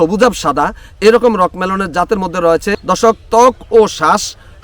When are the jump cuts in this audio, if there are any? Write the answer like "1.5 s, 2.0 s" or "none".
2.7 s

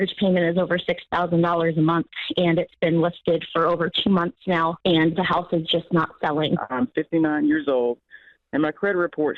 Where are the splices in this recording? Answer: 6.6 s

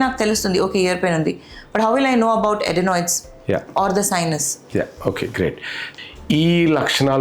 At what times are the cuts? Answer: 5.9 s

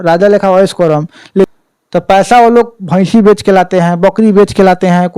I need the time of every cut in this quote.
1.5 s

